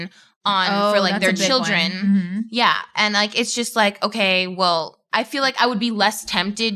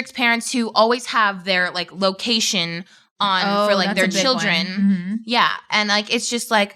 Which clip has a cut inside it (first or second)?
first